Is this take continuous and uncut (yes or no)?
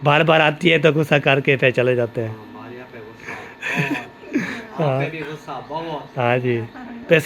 yes